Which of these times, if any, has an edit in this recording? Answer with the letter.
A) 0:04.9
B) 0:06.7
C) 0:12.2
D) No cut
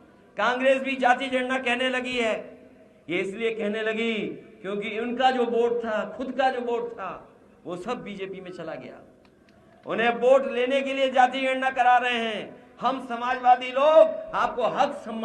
D